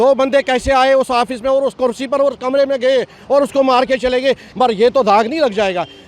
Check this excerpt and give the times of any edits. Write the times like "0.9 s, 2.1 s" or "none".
4.5 s